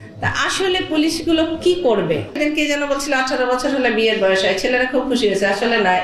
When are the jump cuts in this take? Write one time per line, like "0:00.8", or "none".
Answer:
0:02.3